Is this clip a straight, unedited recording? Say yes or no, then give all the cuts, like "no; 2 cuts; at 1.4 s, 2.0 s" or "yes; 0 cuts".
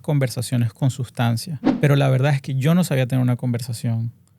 no; 1 cut; at 1.6 s